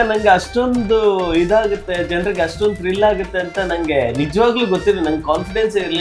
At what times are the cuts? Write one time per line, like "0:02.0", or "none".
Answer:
none